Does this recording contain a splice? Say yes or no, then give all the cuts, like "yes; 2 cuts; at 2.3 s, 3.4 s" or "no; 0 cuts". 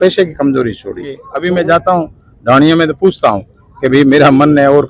yes; 1 cut; at 1.3 s